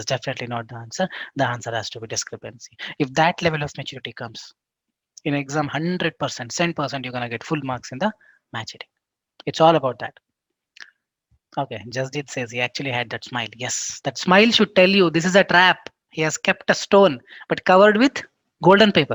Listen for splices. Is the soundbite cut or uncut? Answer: uncut